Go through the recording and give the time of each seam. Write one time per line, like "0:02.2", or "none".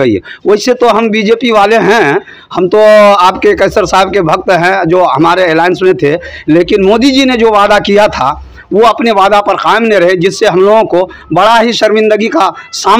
none